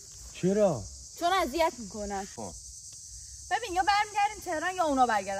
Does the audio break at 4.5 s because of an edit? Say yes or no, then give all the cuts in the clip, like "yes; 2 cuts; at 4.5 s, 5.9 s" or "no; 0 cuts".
no; 1 cut; at 2.4 s